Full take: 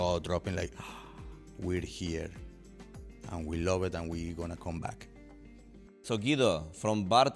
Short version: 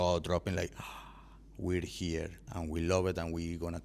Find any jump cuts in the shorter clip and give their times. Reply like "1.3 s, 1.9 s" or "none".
2.4 s